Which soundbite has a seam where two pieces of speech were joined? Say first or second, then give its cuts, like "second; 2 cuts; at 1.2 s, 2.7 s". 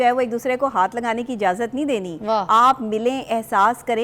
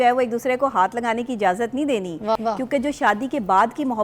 second; 1 cut; at 2.4 s